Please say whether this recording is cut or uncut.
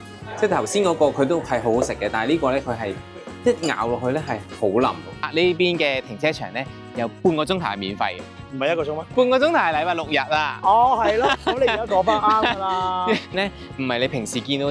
cut